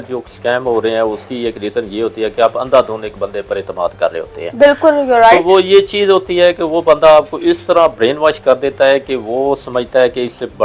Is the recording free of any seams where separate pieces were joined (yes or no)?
yes